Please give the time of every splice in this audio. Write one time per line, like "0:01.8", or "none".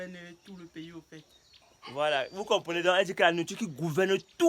0:01.7

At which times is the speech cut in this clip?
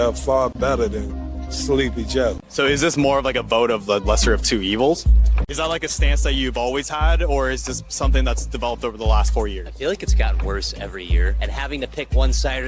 0:02.4
0:05.3

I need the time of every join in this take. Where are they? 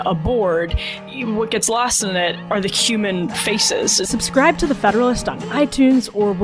0:01.0
0:04.1

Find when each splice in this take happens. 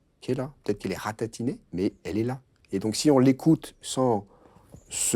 0:01.6

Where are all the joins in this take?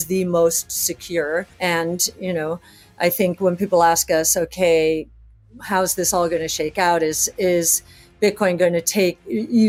none

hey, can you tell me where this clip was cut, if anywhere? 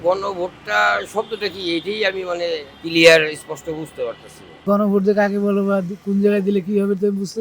0:02.7
0:04.6

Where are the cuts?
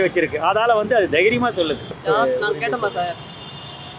0:02.0

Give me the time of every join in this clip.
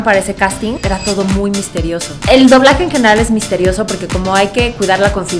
0:00.8
0:02.1

